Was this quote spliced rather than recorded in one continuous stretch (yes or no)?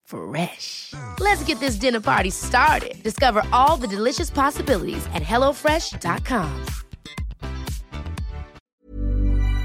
yes